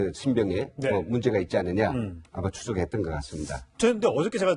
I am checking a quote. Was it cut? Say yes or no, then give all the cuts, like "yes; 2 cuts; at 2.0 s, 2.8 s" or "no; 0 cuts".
no; 0 cuts